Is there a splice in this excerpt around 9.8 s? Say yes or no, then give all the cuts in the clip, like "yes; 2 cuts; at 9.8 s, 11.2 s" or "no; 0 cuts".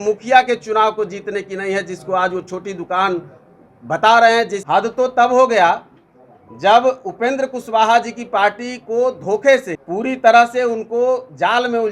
yes; 2 cuts; at 4.6 s, 9.8 s